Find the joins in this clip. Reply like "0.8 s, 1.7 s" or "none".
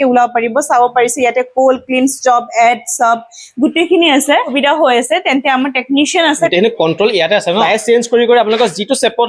4.5 s, 6.5 s, 7.6 s